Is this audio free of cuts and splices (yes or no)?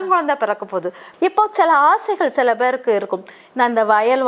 no